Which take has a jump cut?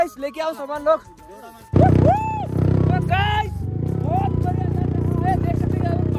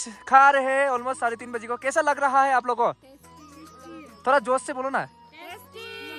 first; 1 cut; at 1.7 s

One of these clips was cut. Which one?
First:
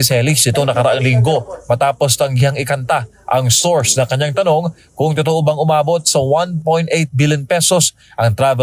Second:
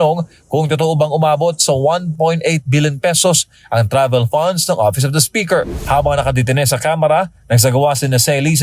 second; 1 cut; at 5.8 s

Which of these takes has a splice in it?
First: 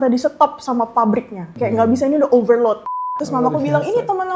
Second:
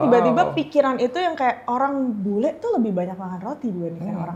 first; 2 cuts; at 1.4 s, 3.2 s

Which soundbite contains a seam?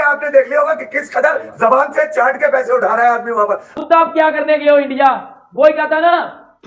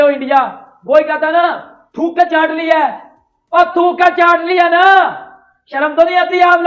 first; 1 cut; at 3.7 s

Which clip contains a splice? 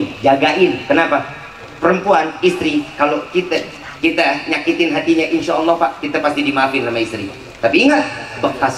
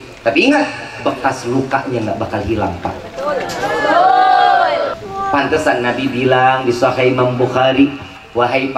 second; 1 cut; at 4.9 s

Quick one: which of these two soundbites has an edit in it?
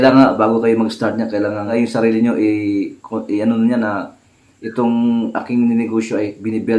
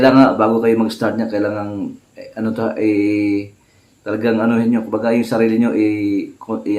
first; 1 cut; at 1.7 s

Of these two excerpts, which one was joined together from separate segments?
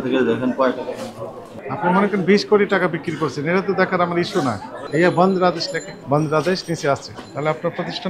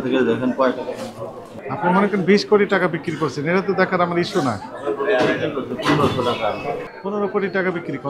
first; 2 cuts; at 4.8 s, 6.0 s

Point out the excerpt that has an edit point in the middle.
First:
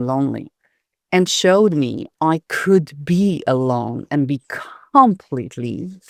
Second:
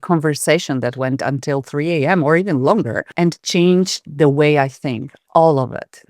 second; 1 cut; at 3.1 s

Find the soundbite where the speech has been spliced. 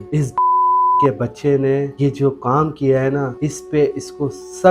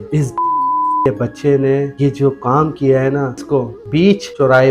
second; 1 cut; at 3.4 s

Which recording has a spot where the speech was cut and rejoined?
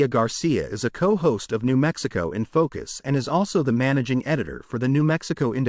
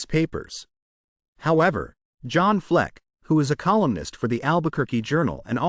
first; 1 cut; at 4.5 s

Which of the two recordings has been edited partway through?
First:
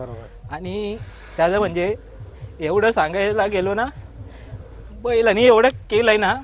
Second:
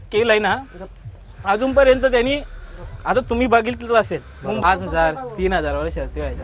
second; 1 cut; at 4.6 s

